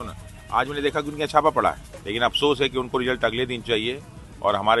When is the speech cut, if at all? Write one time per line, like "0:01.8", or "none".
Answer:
0:01.9